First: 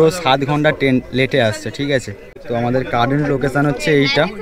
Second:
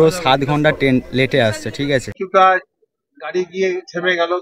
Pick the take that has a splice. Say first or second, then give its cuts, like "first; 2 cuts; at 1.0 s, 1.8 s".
second; 1 cut; at 2.2 s